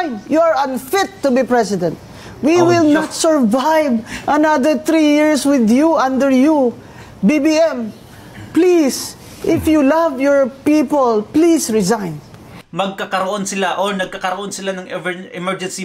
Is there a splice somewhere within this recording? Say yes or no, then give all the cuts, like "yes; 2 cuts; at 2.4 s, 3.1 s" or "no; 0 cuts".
yes; 1 cut; at 12.6 s